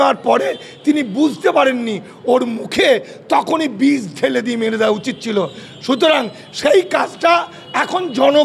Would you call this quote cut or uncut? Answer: uncut